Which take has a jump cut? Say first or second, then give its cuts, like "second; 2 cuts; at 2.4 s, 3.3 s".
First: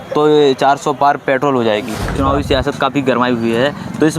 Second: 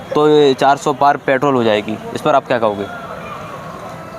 first; 1 cut; at 2.0 s